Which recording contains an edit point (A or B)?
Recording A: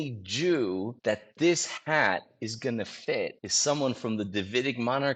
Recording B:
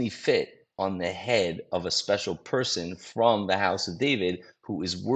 A